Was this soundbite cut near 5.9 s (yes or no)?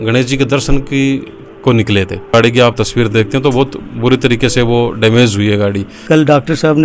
yes